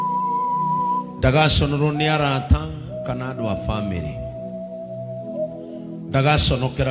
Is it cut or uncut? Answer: cut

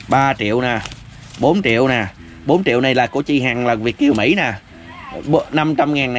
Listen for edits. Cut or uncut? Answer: uncut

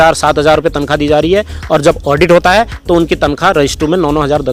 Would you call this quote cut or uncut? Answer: uncut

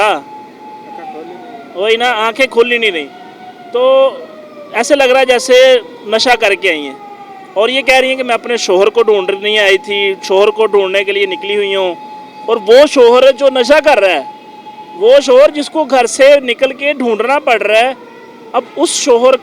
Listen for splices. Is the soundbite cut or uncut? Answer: uncut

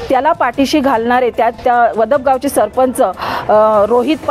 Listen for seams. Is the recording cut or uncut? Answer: uncut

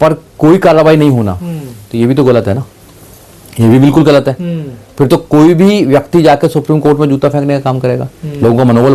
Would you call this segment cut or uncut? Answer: uncut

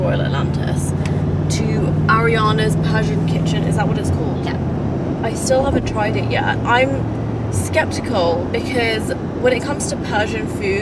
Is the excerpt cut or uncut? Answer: uncut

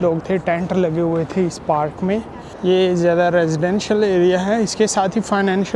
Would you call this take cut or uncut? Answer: cut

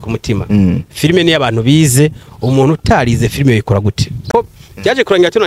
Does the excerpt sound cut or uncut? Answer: cut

